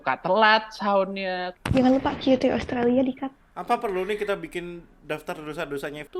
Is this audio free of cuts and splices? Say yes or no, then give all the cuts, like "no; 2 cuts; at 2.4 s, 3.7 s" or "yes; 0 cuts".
no; 2 cuts; at 1.4 s, 3.5 s